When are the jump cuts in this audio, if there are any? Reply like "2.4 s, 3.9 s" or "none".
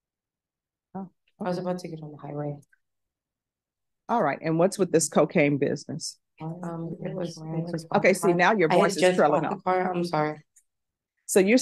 7.5 s